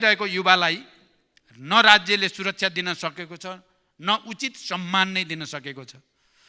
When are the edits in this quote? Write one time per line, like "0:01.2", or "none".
none